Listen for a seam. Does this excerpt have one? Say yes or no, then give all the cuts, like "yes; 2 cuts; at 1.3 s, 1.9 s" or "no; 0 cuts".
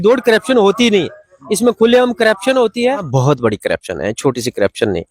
yes; 1 cut; at 3.1 s